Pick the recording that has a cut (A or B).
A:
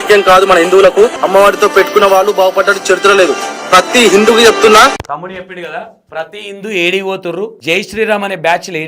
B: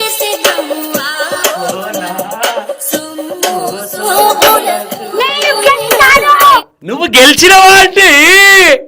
A